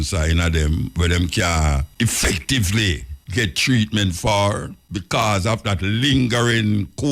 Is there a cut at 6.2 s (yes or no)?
no